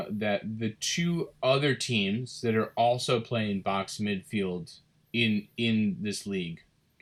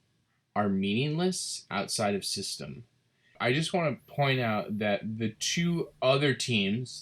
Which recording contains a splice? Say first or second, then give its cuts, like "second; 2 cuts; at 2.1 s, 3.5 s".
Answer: second; 1 cut; at 3.4 s